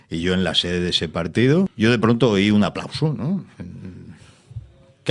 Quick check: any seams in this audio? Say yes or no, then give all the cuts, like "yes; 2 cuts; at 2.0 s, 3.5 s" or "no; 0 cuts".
yes; 1 cut; at 1.7 s